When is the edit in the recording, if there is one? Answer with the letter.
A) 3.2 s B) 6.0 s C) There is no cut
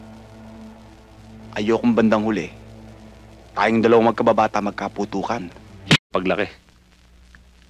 B